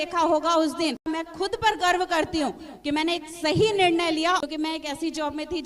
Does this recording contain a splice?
yes; 2 cuts; at 1.0 s, 4.4 s

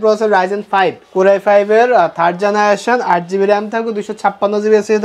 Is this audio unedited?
no; 1 cut; at 1.0 s

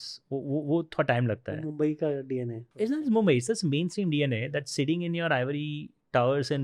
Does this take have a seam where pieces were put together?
yes; 1 cut; at 2.6 s

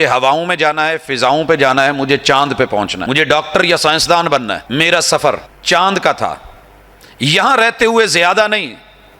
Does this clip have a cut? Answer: yes; 3 cuts; at 3.0 s, 4.6 s, 5.5 s

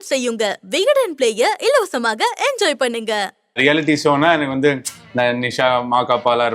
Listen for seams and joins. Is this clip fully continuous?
no; 1 cut; at 3.6 s

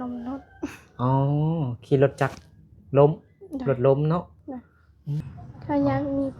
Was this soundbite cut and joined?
yes; 1 cut; at 5.2 s

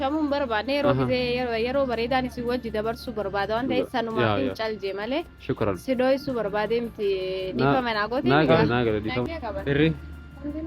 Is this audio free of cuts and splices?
no; 1 cut; at 9.3 s

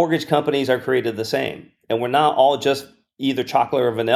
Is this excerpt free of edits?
yes; 0 cuts

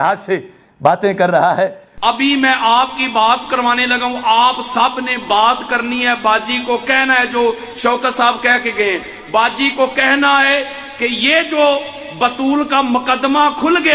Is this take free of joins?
yes; 0 cuts

